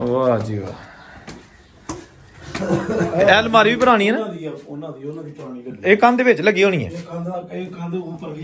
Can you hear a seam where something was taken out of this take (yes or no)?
yes